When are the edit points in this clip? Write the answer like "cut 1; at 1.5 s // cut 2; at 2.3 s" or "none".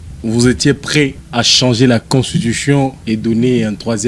cut 1; at 1.2 s // cut 2; at 3.0 s